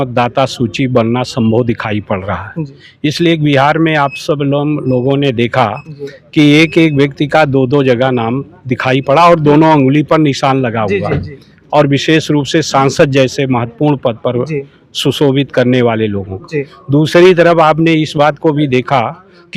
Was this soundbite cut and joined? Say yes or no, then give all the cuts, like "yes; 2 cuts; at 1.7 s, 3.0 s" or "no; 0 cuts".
no; 0 cuts